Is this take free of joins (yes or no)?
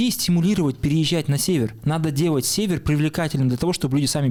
yes